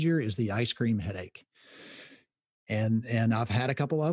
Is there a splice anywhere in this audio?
no; 0 cuts

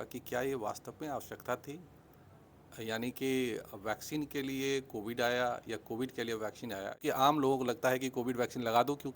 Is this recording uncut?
no; 1 cut; at 7.0 s

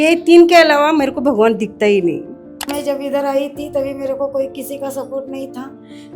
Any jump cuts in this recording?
yes; 1 cut; at 2.6 s

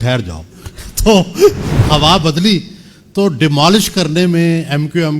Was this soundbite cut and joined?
yes; 1 cut; at 1.7 s

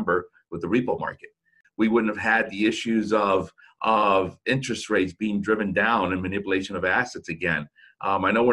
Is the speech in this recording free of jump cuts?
no; 1 cut; at 1.6 s

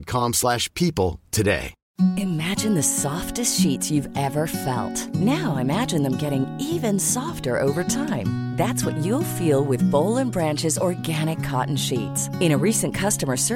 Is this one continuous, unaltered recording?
no; 1 cut; at 1.8 s

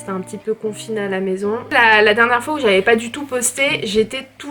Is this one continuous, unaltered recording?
no; 1 cut; at 1.7 s

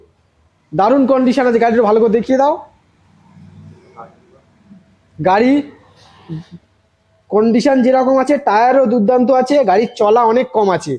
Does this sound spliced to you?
no; 0 cuts

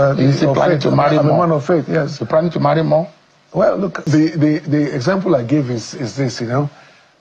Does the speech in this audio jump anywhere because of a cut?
yes; 1 cut; at 4.0 s

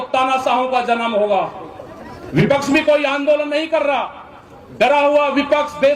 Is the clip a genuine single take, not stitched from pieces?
yes; 0 cuts

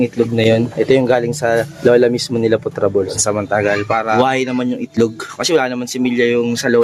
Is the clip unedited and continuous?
yes; 0 cuts

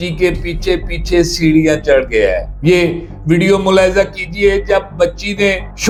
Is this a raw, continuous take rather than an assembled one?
yes; 0 cuts

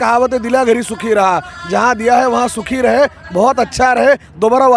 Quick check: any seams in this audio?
no; 0 cuts

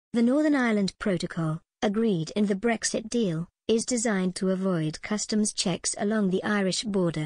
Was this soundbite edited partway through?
yes; 1 cut; at 0.9 s

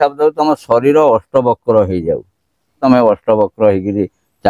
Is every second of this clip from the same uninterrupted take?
no; 1 cut; at 2.8 s

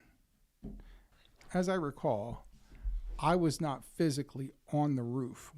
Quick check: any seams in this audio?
yes; 1 cut; at 1.2 s

